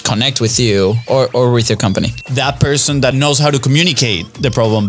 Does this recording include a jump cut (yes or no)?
yes